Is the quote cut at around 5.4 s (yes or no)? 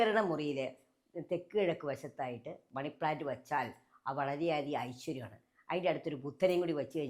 no